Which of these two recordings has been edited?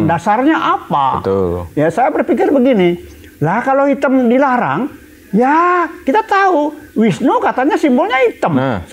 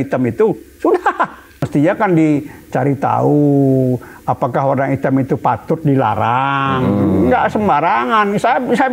second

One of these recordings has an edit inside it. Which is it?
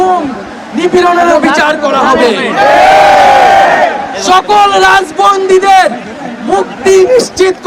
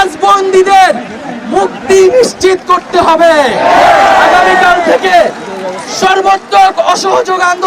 second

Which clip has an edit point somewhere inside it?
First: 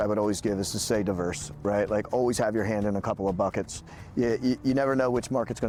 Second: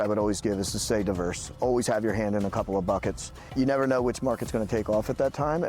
second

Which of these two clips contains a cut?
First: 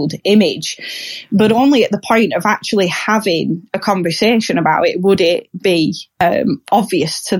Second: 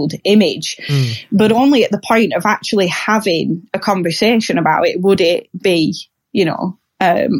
first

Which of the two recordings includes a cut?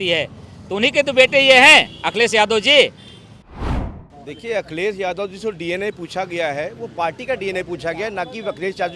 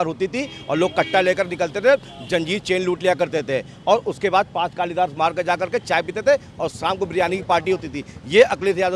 first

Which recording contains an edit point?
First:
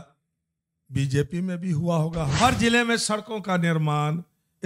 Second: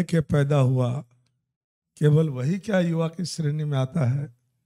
first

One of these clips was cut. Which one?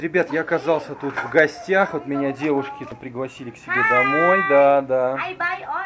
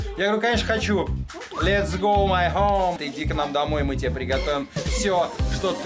first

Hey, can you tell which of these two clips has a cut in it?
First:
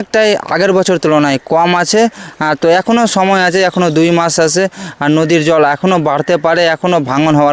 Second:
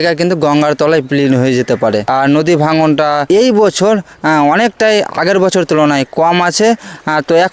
second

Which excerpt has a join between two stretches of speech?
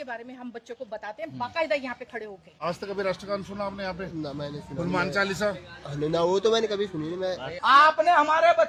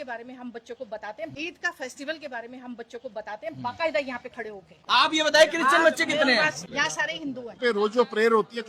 second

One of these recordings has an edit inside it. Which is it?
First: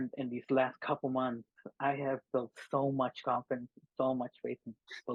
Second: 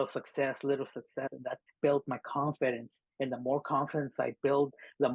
second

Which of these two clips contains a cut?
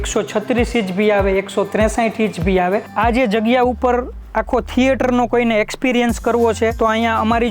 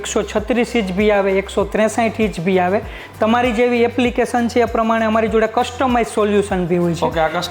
first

